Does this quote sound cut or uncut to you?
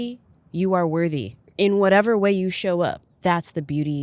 cut